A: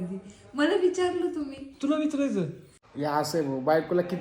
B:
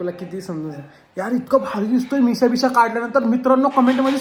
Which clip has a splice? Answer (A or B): A